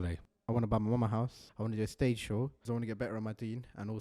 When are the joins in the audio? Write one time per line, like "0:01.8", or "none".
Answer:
0:01.4
0:02.7

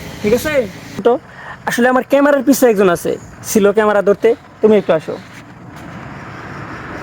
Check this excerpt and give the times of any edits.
0:01.0

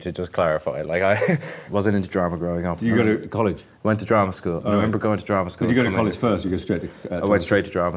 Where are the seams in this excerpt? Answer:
0:01.6

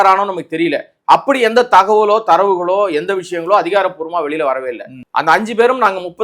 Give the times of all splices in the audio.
0:04.9

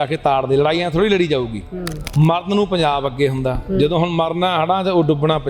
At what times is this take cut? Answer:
0:02.0

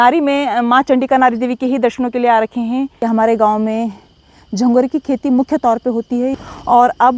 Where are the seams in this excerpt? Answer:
0:02.9
0:06.3

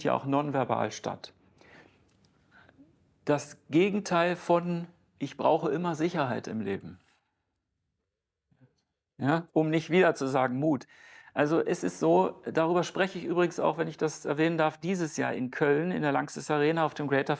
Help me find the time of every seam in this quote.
0:01.6

